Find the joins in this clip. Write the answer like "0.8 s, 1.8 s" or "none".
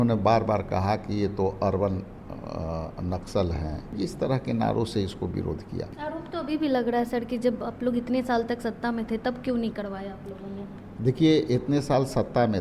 3.9 s, 5.9 s